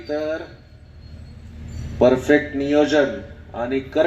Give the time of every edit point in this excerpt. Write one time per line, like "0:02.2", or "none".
none